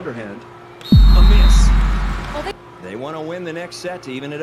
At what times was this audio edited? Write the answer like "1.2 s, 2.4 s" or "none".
2.5 s